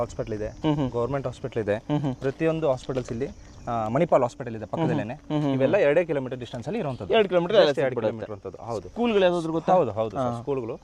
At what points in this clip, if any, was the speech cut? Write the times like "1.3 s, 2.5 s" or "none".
none